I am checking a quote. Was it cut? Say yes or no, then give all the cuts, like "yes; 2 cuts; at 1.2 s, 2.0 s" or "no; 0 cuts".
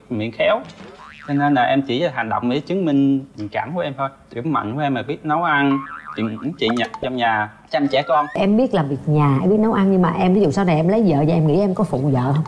yes; 1 cut; at 8.3 s